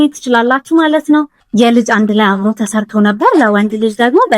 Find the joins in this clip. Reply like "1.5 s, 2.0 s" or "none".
1.4 s